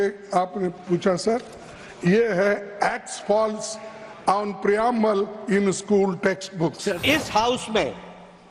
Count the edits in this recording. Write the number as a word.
one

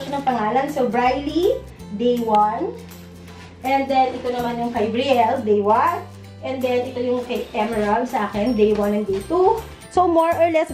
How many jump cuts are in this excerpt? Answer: one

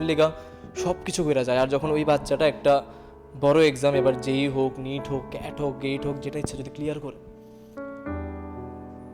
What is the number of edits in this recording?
one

